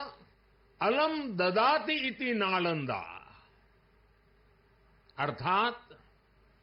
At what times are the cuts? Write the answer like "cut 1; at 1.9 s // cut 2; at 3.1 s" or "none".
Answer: none